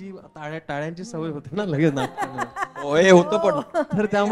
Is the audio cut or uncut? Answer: uncut